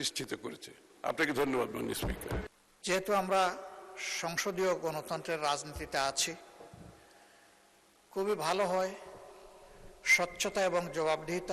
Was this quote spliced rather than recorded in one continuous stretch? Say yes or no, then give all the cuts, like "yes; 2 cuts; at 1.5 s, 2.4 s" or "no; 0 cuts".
yes; 1 cut; at 2.5 s